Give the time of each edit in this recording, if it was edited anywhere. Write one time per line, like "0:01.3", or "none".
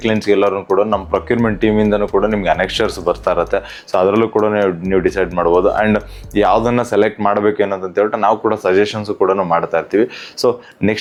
none